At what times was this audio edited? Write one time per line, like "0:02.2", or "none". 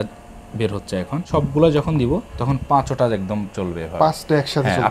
0:01.3